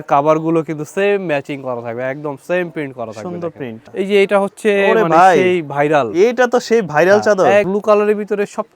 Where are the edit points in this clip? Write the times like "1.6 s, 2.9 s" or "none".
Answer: 3.8 s, 7.7 s